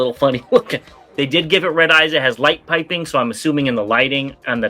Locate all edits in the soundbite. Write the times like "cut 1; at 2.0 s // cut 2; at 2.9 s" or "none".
cut 1; at 1.0 s